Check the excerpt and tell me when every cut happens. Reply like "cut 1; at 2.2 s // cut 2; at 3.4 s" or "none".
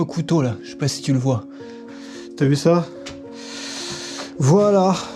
cut 1; at 1.9 s